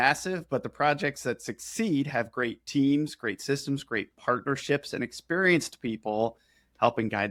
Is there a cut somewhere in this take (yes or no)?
no